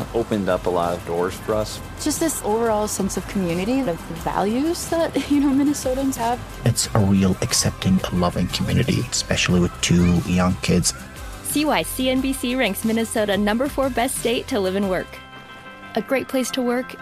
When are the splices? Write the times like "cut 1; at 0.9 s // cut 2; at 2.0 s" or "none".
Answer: none